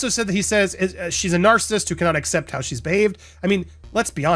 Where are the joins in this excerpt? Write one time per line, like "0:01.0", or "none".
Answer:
none